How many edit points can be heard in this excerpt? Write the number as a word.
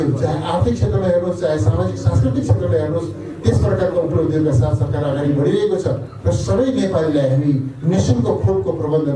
one